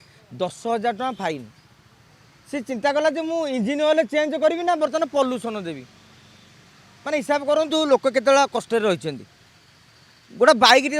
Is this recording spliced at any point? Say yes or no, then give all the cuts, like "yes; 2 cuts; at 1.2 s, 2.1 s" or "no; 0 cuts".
no; 0 cuts